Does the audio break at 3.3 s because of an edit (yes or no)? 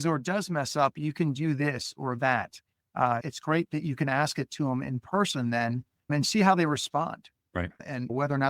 yes